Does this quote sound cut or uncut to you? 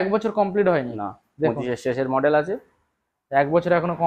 uncut